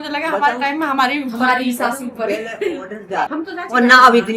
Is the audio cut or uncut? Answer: cut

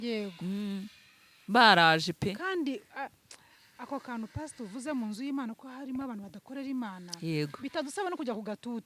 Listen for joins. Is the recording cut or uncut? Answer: uncut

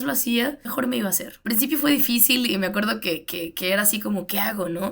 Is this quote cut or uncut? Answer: cut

